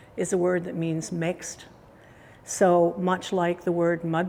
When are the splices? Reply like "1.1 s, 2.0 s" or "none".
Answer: none